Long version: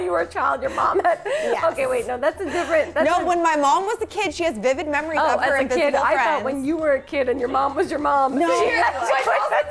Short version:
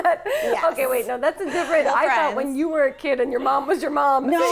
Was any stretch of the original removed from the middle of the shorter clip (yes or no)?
yes